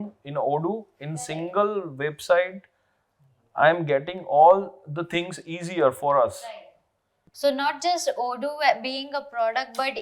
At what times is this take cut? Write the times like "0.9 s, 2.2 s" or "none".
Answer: none

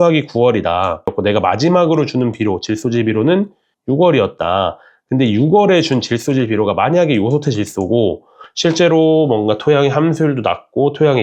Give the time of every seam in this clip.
1.1 s

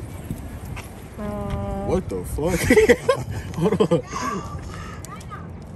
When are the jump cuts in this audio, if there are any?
none

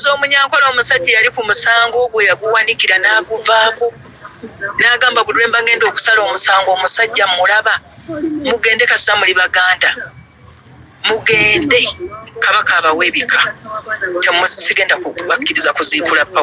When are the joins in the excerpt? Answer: none

